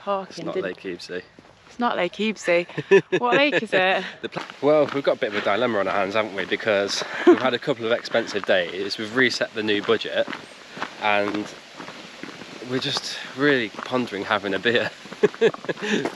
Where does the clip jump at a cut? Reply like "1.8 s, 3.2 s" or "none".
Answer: 4.2 s